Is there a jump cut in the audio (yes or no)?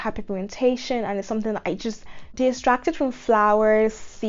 yes